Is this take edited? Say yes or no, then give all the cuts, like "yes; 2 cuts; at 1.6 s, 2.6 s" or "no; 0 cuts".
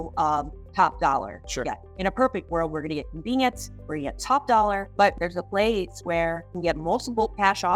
yes; 1 cut; at 6.5 s